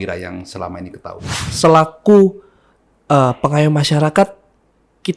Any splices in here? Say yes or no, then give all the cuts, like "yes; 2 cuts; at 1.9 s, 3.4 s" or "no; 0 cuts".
yes; 1 cut; at 1.4 s